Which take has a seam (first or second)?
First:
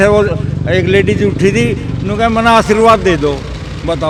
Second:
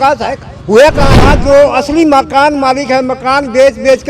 second